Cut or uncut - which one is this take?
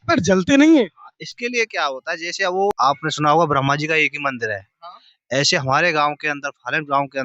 cut